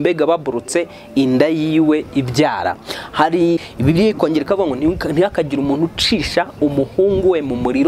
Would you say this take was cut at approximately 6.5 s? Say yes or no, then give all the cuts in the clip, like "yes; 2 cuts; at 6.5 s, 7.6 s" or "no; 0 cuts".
no; 1 cut; at 3.7 s